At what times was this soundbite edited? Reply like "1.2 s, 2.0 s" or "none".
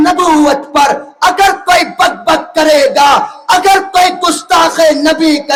none